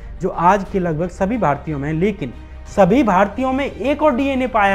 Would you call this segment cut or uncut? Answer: uncut